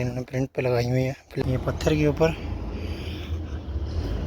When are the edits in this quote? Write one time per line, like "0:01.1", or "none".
0:01.4